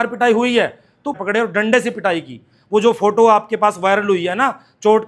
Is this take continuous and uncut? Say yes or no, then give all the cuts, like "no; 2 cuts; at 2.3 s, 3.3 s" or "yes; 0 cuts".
no; 1 cut; at 1.1 s